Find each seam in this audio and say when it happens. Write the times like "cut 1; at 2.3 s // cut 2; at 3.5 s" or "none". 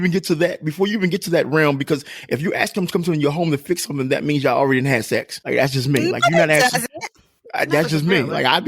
cut 1; at 5.4 s